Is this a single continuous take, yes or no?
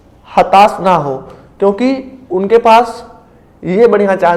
yes